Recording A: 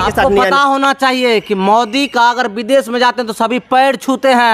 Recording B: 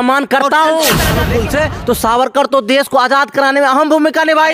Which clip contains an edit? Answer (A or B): B